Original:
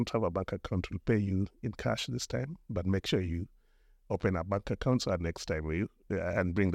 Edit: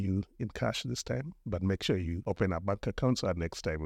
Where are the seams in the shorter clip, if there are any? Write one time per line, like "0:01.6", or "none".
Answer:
0:02.2